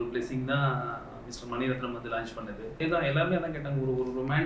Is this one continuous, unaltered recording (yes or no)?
no